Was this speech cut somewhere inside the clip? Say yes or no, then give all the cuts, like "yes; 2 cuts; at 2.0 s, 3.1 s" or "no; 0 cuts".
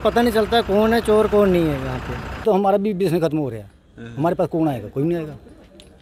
yes; 1 cut; at 2.4 s